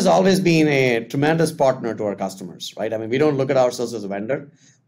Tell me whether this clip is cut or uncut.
uncut